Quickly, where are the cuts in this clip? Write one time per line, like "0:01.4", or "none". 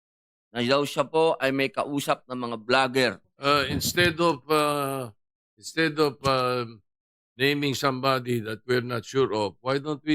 0:03.3